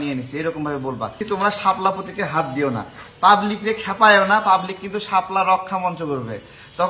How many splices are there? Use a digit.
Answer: 1